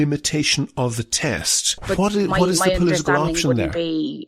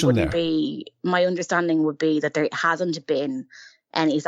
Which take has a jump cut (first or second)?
first